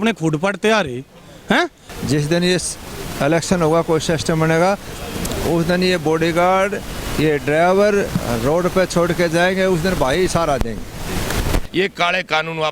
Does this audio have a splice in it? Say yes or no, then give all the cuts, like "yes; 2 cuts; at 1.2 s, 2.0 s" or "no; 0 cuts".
yes; 2 cuts; at 1.9 s, 11.7 s